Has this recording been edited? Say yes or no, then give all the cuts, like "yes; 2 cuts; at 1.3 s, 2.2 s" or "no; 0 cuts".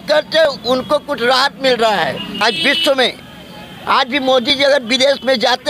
yes; 1 cut; at 2.4 s